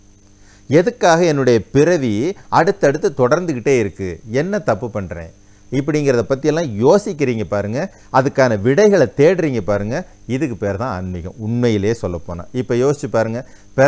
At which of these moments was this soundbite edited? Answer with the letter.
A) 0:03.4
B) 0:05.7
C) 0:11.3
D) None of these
D